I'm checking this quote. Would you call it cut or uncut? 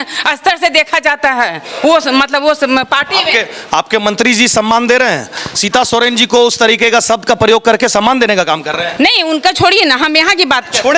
uncut